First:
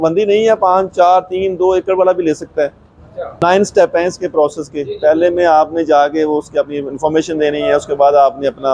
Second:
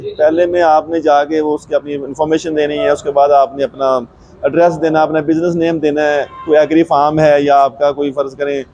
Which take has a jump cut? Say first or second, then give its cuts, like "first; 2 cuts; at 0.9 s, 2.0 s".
first; 1 cut; at 3.4 s